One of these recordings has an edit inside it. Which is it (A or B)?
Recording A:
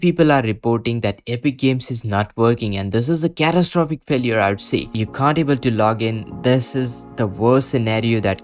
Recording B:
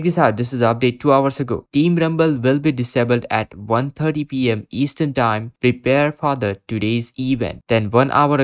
A